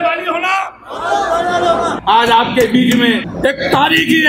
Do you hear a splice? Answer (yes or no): yes